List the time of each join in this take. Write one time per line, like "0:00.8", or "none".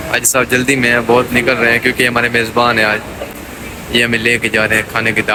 none